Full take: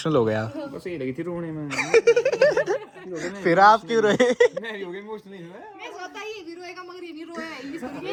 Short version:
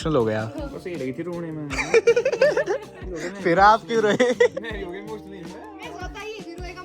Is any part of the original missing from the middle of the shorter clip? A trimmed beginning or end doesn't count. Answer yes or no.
no